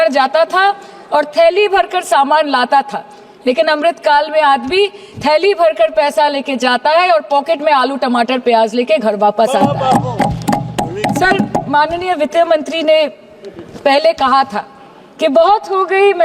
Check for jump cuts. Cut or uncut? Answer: uncut